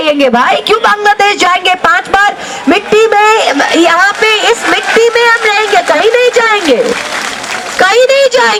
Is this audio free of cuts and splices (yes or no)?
yes